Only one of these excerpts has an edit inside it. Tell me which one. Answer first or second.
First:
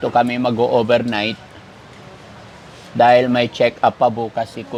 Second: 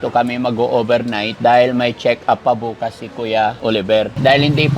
second